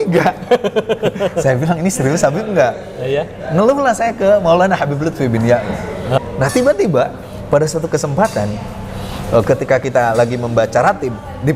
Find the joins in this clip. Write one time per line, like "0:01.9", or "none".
0:06.2